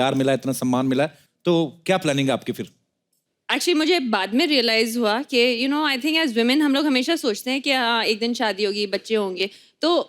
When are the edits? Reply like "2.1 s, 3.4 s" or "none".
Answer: 1.2 s